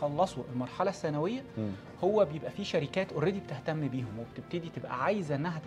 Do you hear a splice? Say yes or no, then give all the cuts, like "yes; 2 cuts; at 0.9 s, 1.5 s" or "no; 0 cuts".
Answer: no; 0 cuts